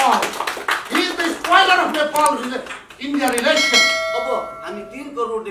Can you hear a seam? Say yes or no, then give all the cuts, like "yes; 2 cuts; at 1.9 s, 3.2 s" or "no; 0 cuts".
yes; 1 cut; at 4.0 s